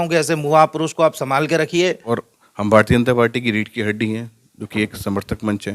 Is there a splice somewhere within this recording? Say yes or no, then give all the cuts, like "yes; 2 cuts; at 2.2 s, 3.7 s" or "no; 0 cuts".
yes; 1 cut; at 2.0 s